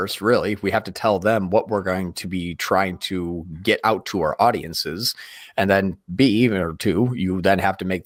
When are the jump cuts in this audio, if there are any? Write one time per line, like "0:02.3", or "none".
none

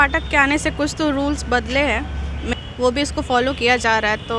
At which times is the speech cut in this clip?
0:02.5

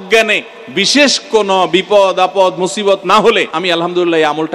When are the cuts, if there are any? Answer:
0:03.5

